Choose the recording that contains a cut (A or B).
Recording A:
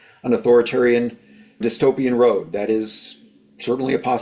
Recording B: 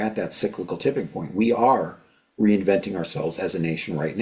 A